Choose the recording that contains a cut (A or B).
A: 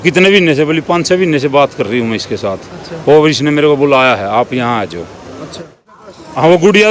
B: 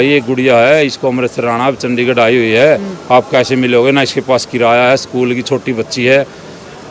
A